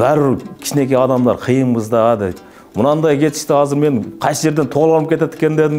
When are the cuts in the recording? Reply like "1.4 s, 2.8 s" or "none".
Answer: none